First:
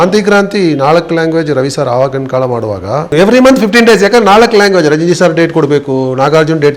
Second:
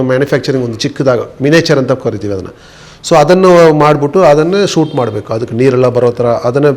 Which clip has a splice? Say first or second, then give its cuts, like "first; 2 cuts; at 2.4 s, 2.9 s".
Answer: first; 1 cut; at 3.1 s